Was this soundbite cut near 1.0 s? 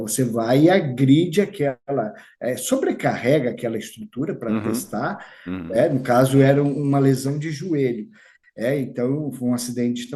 no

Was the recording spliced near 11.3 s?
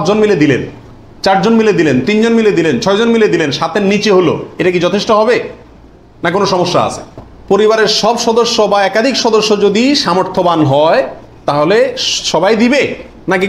no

